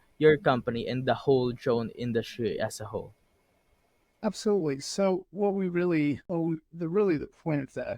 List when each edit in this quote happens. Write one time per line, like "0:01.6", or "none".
0:06.2

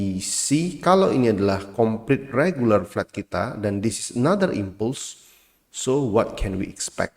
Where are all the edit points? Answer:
none

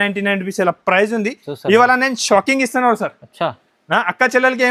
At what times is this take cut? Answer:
none

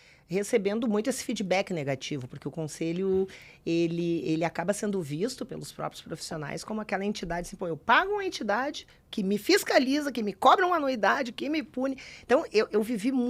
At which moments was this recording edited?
none

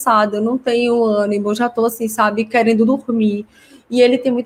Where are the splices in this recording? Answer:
none

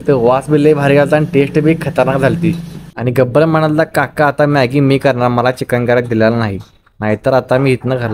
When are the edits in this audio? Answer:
none

